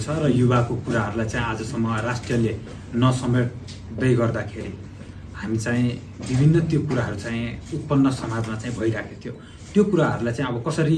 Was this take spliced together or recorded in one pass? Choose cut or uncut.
uncut